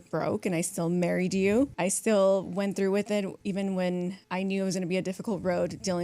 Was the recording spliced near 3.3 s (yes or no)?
yes